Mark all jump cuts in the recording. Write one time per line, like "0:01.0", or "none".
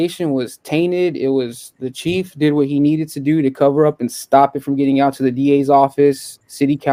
none